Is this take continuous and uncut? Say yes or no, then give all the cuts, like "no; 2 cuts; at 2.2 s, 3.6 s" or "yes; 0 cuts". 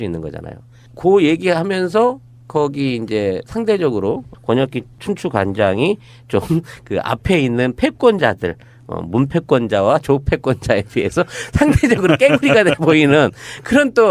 no; 1 cut; at 4.5 s